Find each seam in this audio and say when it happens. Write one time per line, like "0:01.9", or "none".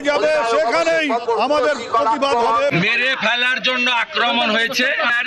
0:01.2
0:02.7